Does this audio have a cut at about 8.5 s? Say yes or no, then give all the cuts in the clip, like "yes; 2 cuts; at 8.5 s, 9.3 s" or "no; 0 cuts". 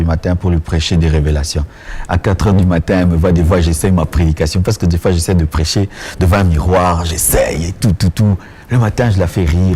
no; 0 cuts